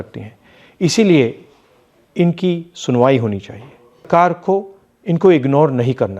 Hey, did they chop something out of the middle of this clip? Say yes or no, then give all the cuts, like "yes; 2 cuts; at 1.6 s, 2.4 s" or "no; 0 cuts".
yes; 1 cut; at 4.1 s